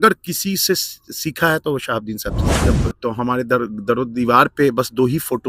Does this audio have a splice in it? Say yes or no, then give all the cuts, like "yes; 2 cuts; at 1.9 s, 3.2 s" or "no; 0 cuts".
yes; 1 cut; at 2.6 s